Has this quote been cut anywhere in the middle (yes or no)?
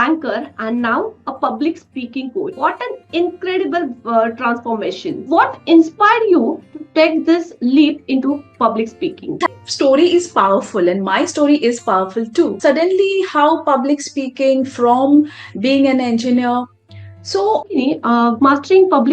yes